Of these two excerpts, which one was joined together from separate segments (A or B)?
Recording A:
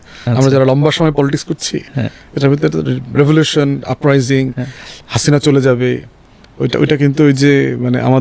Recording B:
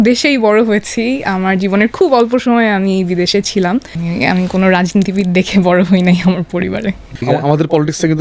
B